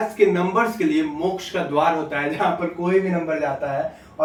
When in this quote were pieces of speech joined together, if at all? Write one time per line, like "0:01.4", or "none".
none